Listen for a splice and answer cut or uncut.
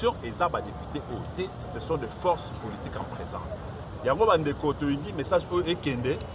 uncut